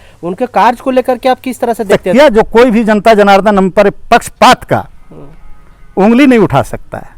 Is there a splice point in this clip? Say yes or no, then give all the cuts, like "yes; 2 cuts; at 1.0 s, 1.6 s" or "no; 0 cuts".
yes; 1 cut; at 2.0 s